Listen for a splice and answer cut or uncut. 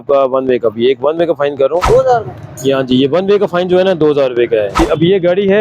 cut